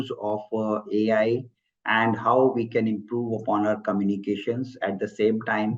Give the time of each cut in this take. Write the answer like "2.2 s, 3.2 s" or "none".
none